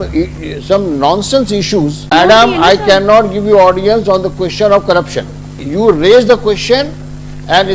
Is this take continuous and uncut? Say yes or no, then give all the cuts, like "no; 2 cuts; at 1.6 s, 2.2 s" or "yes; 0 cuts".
no; 2 cuts; at 2.1 s, 5.6 s